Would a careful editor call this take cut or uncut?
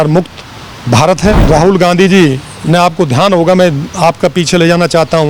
cut